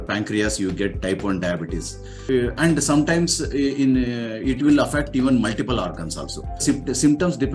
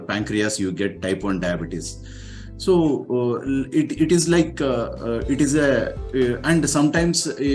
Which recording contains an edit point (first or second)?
first